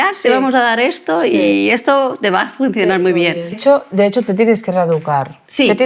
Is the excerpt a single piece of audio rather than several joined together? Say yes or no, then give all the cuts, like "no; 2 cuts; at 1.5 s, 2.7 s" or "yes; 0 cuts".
no; 1 cut; at 3.6 s